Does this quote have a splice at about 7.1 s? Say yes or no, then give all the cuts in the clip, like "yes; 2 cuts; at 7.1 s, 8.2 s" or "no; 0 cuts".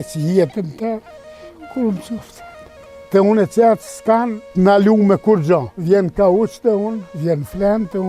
yes; 4 cuts; at 3.0 s, 4.4 s, 5.7 s, 7.1 s